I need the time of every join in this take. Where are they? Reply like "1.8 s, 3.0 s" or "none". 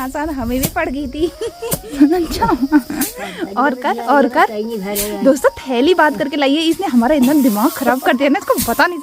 2.0 s